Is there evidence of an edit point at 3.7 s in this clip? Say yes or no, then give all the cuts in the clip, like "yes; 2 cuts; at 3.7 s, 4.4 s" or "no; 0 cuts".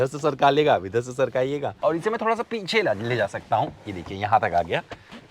no; 1 cut; at 1.7 s